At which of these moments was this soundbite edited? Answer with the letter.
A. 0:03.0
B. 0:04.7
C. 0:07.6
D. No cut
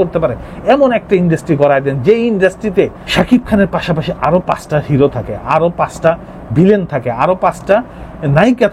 A